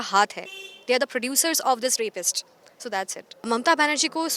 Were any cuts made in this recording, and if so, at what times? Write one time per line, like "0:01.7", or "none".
0:03.5